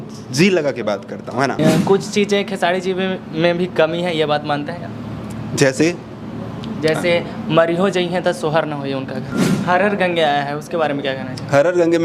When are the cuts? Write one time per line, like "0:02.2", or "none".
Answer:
0:01.6
0:09.3